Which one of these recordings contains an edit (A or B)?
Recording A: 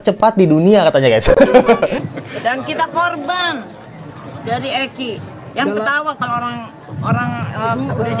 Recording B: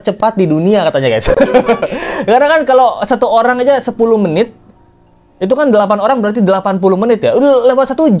A